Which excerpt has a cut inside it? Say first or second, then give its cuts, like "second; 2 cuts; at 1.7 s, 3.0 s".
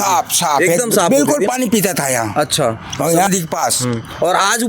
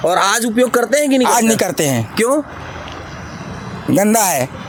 first; 1 cut; at 3.3 s